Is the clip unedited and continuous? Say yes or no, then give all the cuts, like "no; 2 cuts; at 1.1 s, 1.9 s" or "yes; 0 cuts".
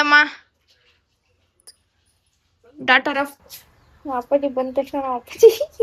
no; 1 cut; at 3.4 s